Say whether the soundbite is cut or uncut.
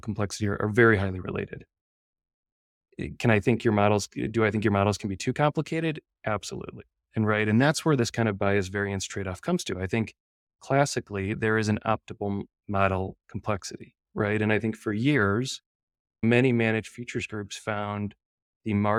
uncut